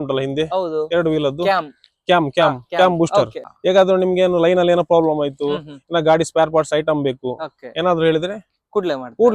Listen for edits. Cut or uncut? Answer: cut